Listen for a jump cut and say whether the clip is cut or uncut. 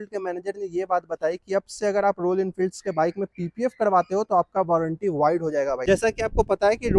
cut